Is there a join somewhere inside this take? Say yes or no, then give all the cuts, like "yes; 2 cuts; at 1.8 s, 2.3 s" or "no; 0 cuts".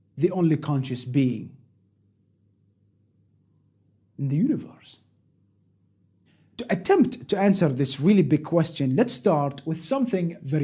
yes; 1 cut; at 6.8 s